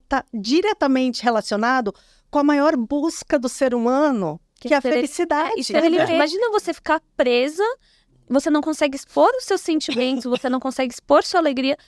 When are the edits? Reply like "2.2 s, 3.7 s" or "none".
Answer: 6.1 s